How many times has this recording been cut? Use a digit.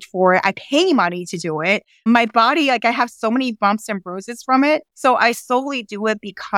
0